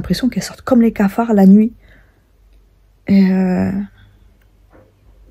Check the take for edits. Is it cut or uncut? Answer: uncut